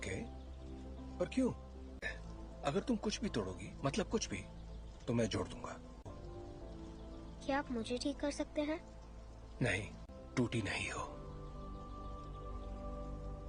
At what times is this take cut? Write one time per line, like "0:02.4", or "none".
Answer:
none